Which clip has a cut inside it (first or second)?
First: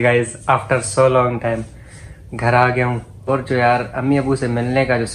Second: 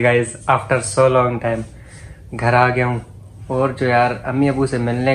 first